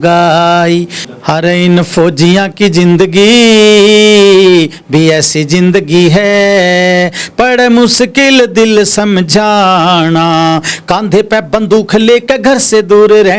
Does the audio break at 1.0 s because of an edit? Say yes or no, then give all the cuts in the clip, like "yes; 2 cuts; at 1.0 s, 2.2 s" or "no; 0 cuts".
yes; 1 cut; at 1.0 s